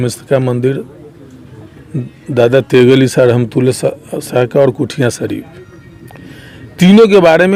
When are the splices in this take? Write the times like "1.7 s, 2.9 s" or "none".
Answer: none